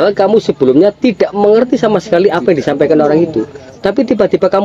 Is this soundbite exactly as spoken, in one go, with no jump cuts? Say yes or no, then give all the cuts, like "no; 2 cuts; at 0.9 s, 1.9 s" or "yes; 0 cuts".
yes; 0 cuts